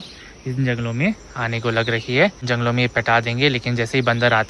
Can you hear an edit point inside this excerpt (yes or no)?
no